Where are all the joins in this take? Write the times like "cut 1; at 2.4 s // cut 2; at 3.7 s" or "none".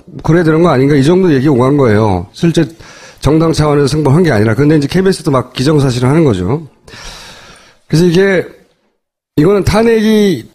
none

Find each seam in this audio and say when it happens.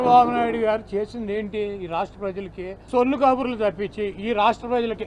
cut 1; at 2.9 s

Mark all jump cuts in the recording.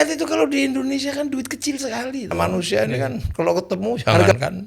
cut 1; at 2.3 s

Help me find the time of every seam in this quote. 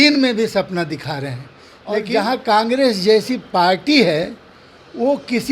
cut 1; at 2.0 s

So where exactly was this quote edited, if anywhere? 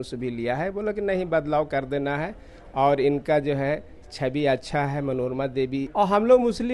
cut 1; at 5.8 s

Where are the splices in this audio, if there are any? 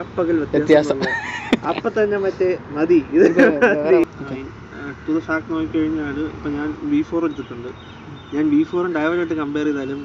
cut 1; at 4.1 s

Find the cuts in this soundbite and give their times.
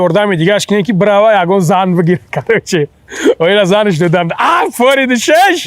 none

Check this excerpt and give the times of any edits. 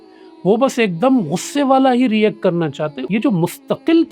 cut 1; at 3.0 s

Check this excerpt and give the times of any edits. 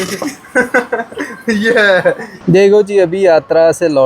cut 1; at 2.4 s

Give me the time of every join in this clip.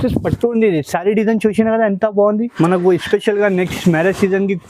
cut 1; at 2.5 s

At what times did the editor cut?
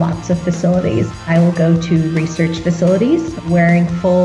cut 1; at 1.1 s // cut 2; at 3.4 s

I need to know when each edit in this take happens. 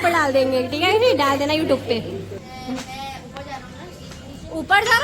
cut 1; at 2.4 s

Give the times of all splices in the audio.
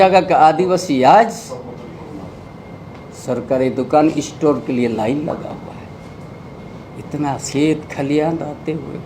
none

